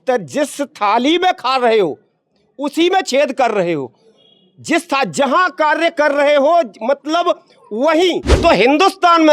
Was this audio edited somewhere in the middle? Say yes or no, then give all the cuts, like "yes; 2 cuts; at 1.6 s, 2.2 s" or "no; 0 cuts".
yes; 1 cut; at 8.3 s